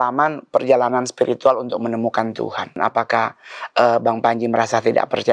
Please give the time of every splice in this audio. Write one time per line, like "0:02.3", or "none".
0:02.8